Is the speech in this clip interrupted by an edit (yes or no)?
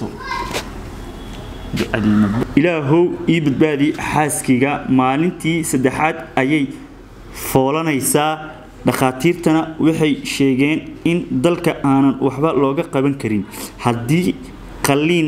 yes